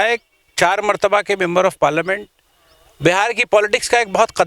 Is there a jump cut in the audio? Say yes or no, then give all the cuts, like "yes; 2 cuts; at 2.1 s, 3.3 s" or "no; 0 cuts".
no; 0 cuts